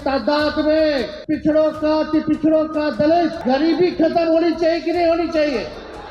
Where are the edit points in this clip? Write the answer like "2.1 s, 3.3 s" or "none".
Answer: 1.1 s, 3.4 s